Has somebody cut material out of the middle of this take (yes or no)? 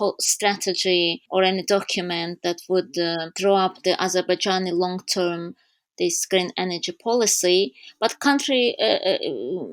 no